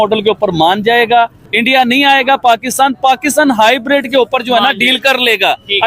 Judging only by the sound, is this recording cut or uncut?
cut